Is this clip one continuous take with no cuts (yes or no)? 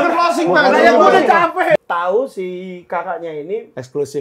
no